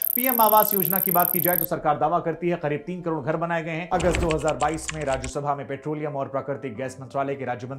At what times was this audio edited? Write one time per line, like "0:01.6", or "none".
0:03.8